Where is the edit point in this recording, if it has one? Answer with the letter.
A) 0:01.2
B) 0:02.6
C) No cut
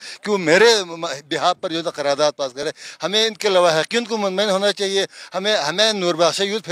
C